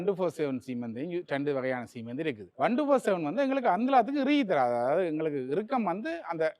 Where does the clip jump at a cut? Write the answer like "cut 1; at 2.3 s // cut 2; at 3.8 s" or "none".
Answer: cut 1; at 2.5 s